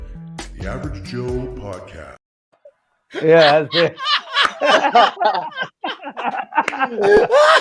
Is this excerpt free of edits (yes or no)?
yes